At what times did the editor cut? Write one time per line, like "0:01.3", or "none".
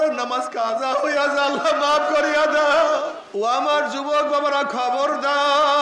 0:03.2